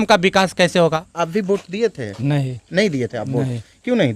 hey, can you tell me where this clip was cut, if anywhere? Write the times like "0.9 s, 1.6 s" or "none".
1.1 s

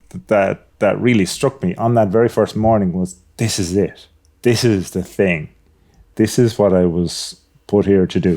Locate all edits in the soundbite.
6.0 s

